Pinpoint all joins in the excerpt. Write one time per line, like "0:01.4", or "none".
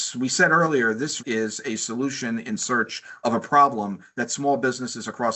0:01.2